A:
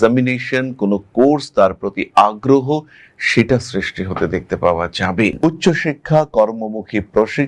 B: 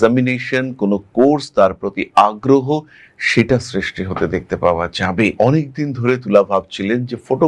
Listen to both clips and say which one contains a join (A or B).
A